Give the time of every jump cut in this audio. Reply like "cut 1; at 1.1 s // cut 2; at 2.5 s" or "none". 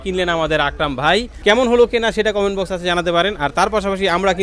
cut 1; at 1.3 s